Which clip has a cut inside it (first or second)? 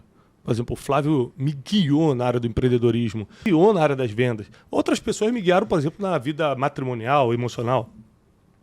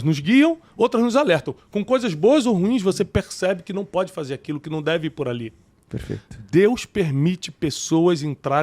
first